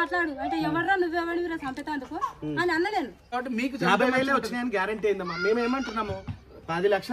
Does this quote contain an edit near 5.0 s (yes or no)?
no